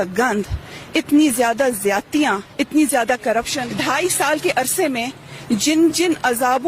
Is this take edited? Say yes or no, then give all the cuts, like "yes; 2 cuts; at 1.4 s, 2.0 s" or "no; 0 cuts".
yes; 1 cut; at 3.6 s